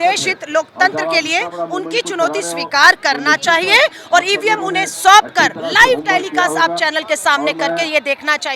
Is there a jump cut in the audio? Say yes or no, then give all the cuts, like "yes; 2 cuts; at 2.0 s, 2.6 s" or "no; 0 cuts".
no; 0 cuts